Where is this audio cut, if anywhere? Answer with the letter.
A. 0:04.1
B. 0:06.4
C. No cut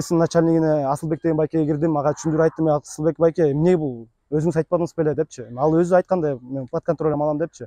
C